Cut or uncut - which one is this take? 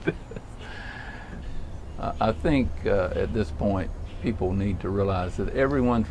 cut